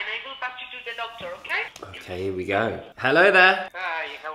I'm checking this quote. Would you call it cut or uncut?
uncut